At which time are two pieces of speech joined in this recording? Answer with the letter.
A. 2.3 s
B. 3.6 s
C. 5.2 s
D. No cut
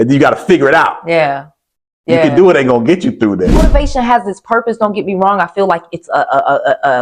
B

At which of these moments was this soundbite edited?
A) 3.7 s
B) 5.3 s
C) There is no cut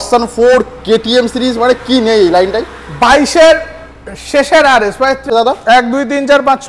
B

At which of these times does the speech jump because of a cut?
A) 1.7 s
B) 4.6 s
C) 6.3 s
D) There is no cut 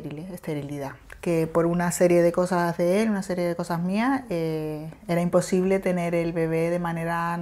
D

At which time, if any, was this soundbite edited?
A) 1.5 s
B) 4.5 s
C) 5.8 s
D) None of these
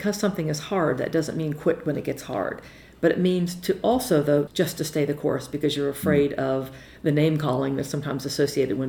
B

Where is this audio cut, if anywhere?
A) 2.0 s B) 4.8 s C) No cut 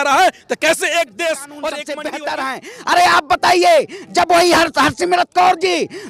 A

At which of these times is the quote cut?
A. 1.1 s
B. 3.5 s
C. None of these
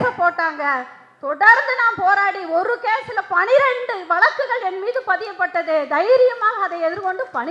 C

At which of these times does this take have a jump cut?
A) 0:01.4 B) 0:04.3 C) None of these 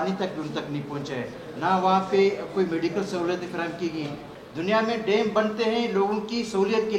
B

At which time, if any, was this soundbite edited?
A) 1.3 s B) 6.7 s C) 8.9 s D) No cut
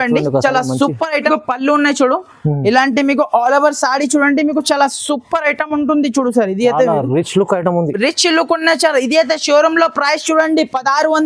A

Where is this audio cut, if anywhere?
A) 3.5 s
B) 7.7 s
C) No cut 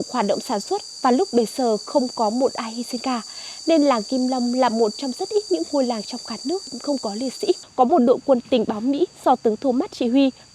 B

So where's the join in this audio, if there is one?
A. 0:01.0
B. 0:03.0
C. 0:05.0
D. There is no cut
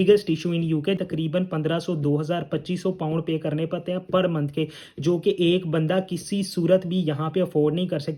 A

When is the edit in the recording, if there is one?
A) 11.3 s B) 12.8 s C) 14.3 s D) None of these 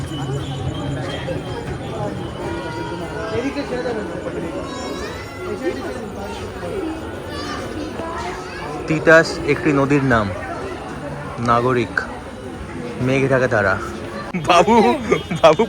C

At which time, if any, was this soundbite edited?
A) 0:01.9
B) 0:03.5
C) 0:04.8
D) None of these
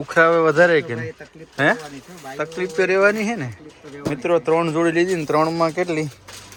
D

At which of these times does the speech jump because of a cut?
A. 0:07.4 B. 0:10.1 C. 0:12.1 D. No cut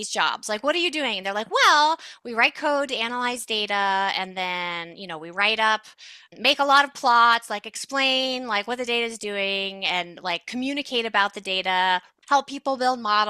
C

